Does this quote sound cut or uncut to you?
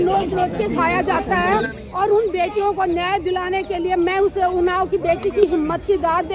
uncut